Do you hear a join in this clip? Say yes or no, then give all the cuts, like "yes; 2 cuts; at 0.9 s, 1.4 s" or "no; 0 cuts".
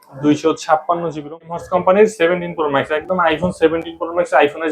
yes; 1 cut; at 1.3 s